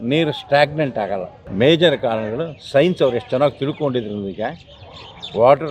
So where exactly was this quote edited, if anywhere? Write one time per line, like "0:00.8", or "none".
0:01.4